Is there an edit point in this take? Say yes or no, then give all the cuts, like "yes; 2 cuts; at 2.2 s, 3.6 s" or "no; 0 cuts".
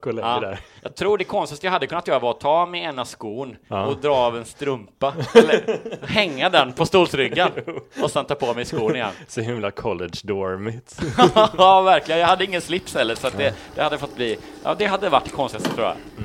no; 0 cuts